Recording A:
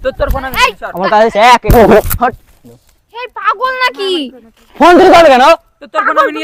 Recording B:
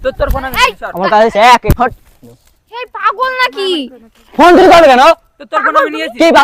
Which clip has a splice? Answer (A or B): B